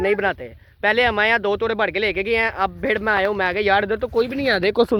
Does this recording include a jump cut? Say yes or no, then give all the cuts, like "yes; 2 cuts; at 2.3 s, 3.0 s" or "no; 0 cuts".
no; 0 cuts